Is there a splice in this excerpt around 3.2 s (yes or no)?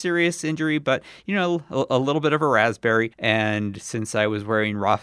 yes